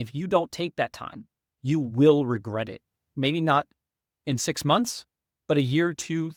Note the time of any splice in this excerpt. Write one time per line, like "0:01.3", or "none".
none